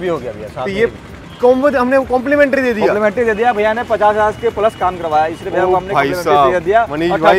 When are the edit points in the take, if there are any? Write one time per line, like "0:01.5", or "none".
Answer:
none